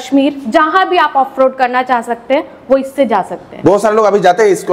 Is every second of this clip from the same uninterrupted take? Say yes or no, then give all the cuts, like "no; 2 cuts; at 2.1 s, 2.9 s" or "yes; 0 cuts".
yes; 0 cuts